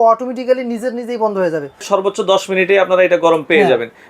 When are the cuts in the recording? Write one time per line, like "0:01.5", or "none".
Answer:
0:01.8